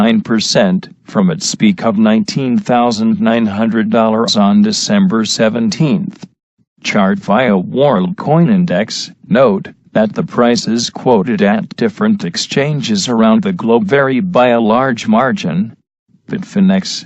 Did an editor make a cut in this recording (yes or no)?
no